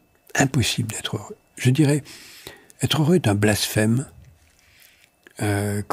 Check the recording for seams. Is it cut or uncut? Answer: uncut